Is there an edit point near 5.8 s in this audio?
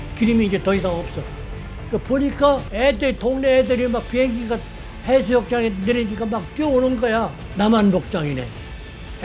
no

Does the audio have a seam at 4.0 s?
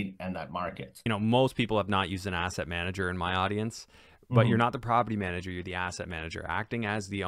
no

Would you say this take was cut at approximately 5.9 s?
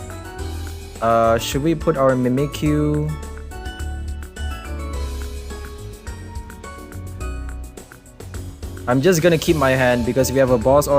no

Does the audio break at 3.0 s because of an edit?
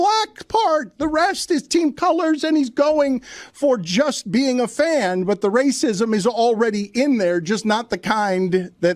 yes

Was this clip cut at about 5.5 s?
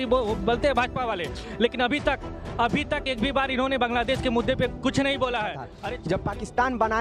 yes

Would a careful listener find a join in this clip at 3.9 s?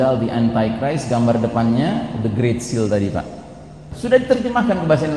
yes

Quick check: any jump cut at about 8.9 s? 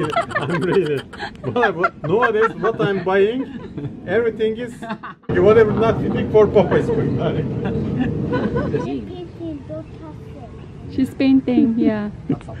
yes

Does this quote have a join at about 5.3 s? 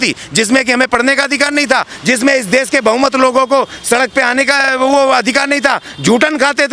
no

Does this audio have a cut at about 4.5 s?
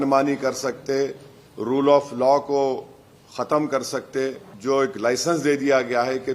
yes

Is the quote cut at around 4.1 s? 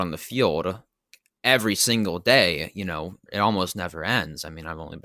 no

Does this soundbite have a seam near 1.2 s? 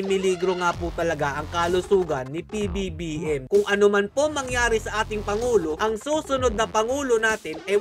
no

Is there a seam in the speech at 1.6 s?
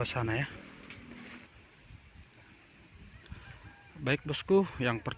yes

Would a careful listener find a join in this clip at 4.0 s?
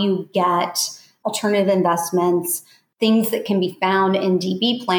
no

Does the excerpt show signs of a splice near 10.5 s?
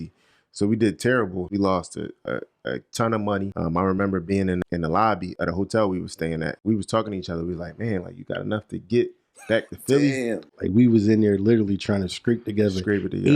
yes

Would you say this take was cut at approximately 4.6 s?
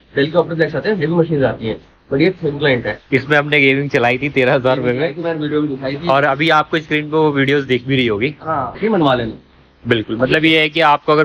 no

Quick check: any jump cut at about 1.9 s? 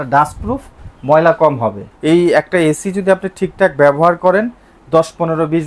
yes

